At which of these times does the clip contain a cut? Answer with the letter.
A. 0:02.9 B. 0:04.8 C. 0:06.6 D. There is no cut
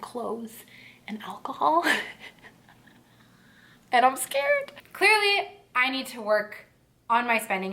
B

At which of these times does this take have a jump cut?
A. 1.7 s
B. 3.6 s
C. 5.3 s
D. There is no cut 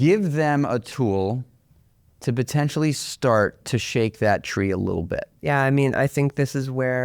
C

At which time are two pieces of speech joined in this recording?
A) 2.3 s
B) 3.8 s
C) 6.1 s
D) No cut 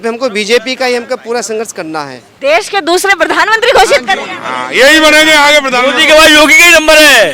A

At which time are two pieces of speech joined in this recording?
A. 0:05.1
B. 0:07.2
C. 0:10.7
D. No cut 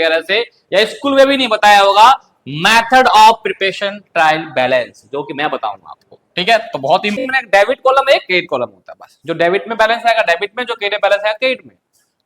B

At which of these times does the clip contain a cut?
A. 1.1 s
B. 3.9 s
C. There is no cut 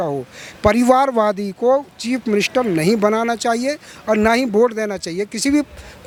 C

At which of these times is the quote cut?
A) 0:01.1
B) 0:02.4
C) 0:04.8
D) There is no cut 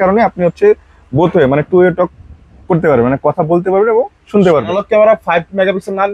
C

